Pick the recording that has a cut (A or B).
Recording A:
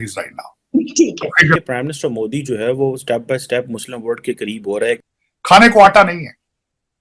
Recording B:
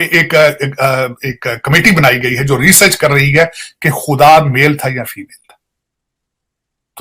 A